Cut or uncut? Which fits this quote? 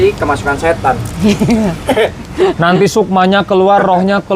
uncut